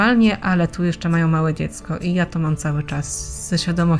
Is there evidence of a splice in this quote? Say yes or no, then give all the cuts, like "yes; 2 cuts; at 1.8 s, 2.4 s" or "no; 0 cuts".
no; 0 cuts